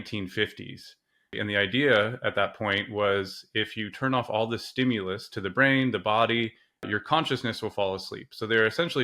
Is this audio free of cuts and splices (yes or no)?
no